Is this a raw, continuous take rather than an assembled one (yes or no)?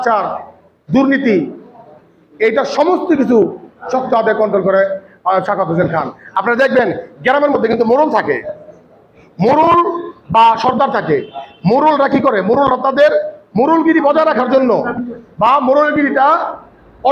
yes